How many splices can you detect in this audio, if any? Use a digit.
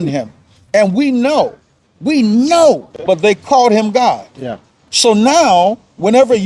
1